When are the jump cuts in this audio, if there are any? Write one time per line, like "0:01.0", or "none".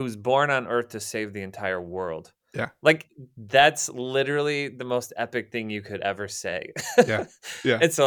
none